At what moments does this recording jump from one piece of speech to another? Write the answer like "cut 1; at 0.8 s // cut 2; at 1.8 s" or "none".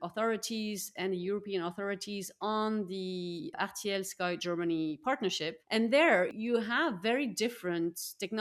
cut 1; at 3.5 s // cut 2; at 5.5 s // cut 3; at 6.3 s

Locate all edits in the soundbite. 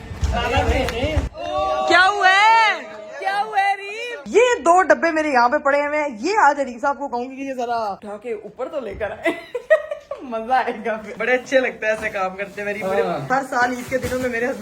cut 1; at 4.1 s // cut 2; at 11.1 s // cut 3; at 13.3 s

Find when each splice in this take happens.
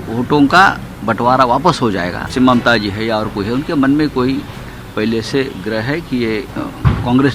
cut 1; at 2.3 s

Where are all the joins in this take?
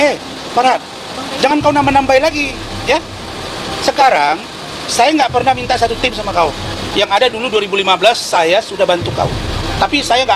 none

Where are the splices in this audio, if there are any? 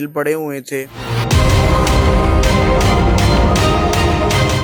none

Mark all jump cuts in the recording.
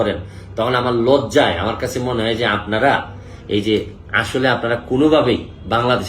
none

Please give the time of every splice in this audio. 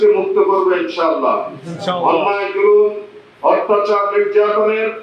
none

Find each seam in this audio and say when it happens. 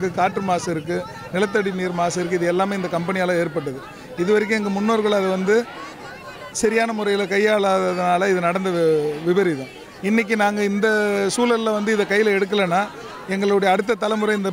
none

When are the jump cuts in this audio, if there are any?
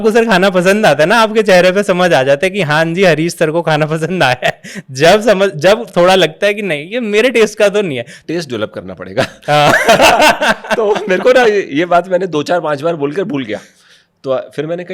cut 1; at 8.2 s

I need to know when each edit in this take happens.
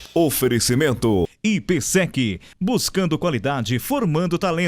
cut 1; at 1.3 s

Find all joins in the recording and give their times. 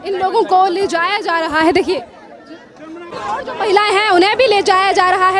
cut 1; at 3.1 s

